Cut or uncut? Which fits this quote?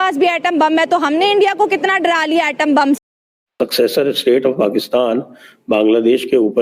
cut